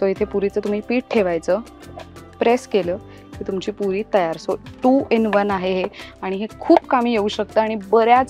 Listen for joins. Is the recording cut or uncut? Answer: uncut